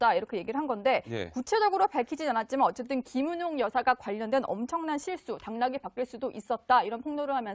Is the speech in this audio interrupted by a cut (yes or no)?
yes